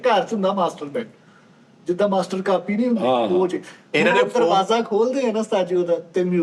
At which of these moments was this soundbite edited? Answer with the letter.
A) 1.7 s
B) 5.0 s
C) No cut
C